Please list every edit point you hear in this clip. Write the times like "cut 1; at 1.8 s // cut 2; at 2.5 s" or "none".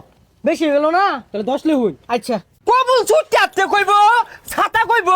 cut 1; at 2.5 s